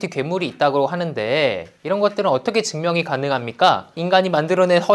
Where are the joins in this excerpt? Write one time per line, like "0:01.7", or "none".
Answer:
0:04.0